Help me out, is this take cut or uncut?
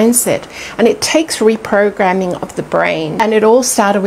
cut